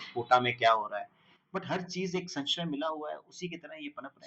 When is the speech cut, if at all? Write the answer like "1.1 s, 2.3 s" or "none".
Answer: none